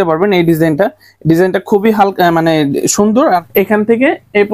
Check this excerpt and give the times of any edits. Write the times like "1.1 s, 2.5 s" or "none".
3.5 s